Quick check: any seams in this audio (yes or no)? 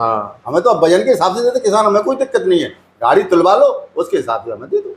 no